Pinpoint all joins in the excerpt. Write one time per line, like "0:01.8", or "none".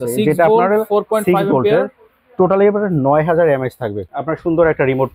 0:04.0